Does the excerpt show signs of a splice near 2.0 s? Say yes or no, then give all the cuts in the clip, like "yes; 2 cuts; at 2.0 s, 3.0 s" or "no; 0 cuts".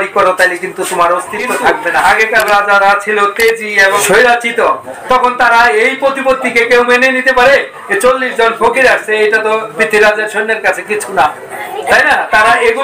yes; 2 cuts; at 2.0 s, 4.0 s